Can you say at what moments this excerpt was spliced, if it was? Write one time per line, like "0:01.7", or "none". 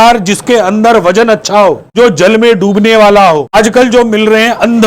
0:01.8
0:03.5